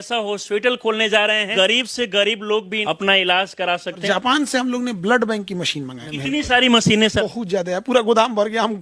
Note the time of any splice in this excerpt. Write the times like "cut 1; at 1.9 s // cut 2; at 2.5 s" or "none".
cut 1; at 1.5 s // cut 2; at 2.8 s // cut 3; at 4.0 s // cut 4; at 6.0 s // cut 5; at 7.2 s